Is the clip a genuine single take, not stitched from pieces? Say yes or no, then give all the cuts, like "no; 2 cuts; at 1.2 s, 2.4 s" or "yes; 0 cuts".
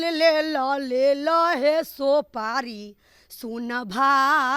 yes; 0 cuts